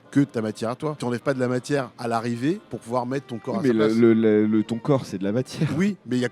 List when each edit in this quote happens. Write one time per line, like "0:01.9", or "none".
0:00.9
0:01.9
0:02.7